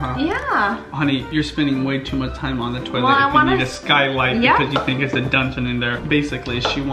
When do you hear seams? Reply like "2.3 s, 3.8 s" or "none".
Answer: 6.0 s

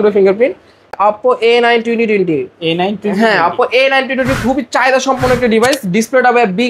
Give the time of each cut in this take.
1.0 s

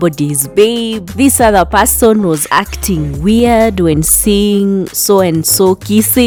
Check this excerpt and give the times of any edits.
none

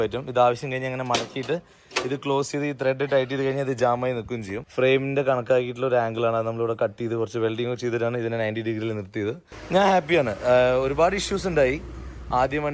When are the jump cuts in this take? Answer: 4.6 s, 9.5 s

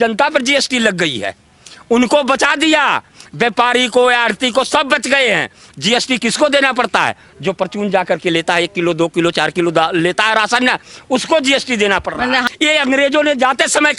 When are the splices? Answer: 12.5 s

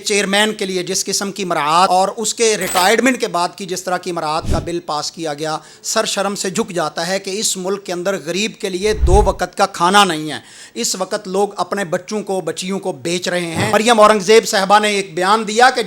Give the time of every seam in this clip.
1.9 s, 13.7 s

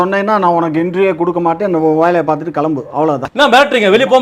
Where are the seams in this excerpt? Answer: 3.2 s

